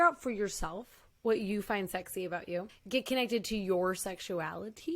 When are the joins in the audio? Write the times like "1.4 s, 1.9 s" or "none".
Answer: 2.8 s